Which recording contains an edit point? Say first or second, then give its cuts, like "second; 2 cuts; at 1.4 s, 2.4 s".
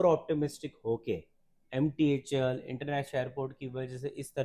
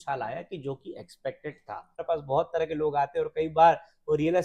second; 1 cut; at 2.0 s